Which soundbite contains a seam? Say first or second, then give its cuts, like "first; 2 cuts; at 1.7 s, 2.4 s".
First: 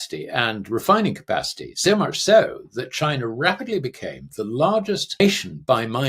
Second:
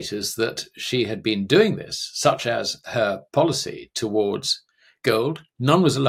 first; 1 cut; at 5.2 s